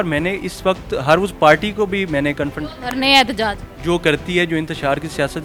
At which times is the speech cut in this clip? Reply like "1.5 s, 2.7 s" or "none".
none